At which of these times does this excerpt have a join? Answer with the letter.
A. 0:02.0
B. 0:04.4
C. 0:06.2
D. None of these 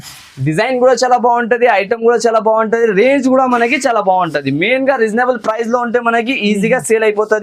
D